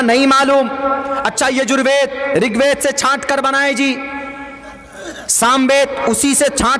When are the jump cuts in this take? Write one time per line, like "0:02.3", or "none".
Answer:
none